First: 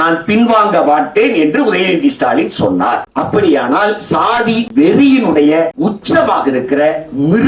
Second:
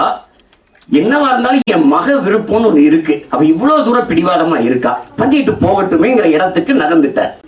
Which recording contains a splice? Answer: first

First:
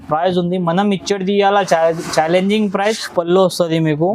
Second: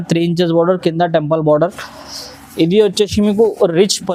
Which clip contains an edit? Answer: first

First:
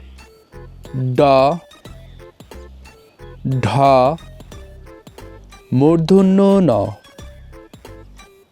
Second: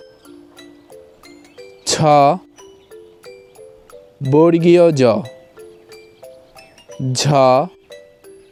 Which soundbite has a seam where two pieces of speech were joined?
first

